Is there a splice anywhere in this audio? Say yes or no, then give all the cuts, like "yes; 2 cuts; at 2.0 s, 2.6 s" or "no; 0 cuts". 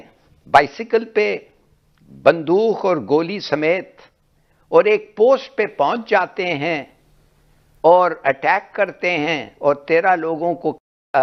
no; 0 cuts